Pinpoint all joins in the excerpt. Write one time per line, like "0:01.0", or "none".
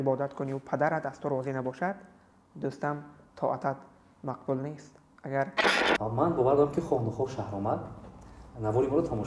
0:05.7